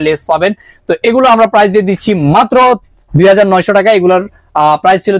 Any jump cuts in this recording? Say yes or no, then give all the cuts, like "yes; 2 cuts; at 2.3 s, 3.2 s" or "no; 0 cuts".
no; 0 cuts